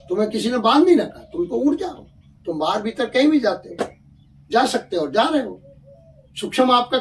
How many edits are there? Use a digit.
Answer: 0